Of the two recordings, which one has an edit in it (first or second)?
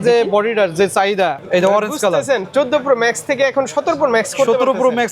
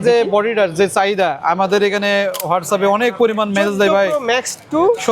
first